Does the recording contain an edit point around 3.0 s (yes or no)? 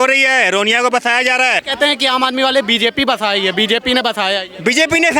no